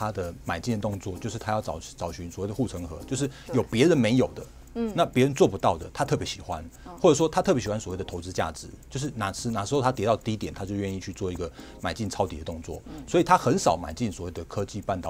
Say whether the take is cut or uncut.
uncut